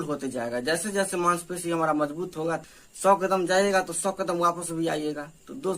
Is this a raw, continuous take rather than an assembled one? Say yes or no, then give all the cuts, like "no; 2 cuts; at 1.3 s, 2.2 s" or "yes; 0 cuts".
no; 1 cut; at 2.6 s